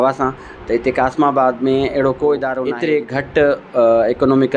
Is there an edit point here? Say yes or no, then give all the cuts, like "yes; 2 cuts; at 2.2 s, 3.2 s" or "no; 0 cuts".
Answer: yes; 1 cut; at 2.6 s